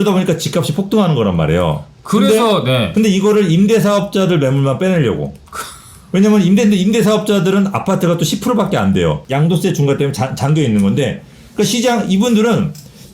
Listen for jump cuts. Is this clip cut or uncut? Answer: cut